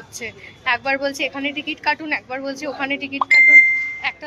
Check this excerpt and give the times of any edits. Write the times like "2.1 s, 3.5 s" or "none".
none